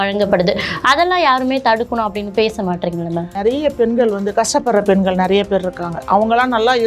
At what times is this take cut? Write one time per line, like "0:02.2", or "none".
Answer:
0:03.3